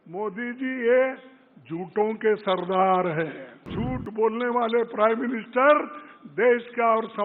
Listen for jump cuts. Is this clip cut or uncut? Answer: cut